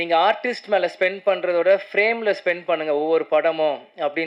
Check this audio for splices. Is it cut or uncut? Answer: uncut